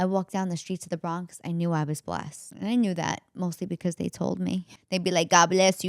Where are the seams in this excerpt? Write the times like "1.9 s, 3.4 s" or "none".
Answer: 2.4 s, 4.7 s